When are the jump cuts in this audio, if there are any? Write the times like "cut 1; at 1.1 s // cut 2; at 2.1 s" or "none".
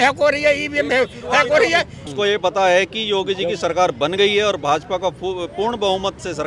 cut 1; at 2.0 s